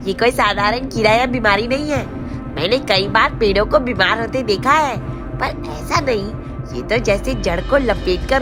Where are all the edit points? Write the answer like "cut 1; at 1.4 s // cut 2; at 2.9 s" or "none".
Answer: none

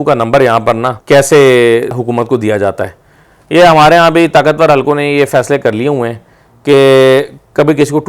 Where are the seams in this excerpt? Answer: cut 1; at 0.9 s // cut 2; at 2.0 s

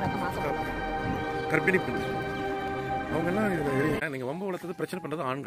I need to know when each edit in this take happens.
cut 1; at 4.0 s

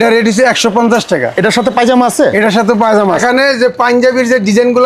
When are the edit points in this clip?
cut 1; at 3.2 s

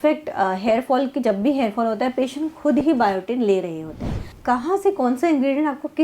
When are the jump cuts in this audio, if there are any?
cut 1; at 4.3 s

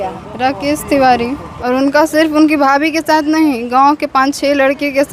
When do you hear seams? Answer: cut 1; at 1.4 s

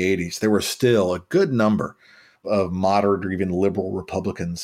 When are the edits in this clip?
cut 1; at 2.4 s

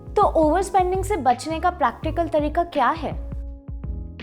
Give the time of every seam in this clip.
cut 1; at 3.2 s

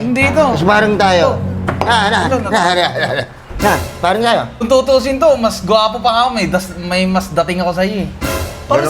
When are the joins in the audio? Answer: cut 1; at 4.6 s

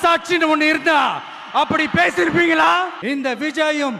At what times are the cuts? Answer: cut 1; at 3.0 s

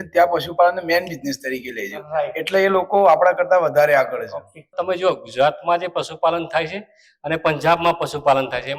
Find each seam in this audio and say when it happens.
cut 1; at 4.7 s

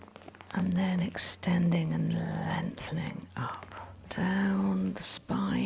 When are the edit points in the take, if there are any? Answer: cut 1; at 4.1 s

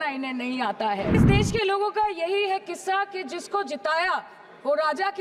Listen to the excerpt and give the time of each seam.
cut 1; at 1.2 s

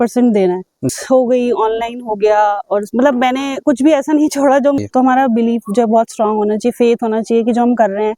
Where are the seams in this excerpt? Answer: cut 1; at 0.8 s // cut 2; at 4.8 s

